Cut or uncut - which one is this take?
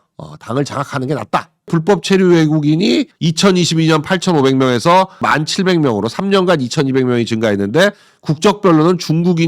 cut